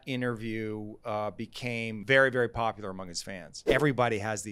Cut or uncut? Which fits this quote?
cut